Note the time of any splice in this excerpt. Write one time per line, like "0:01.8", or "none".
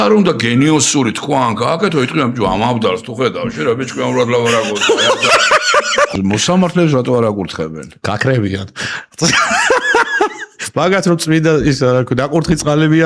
0:06.1